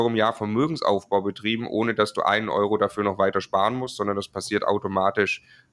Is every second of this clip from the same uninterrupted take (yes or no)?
yes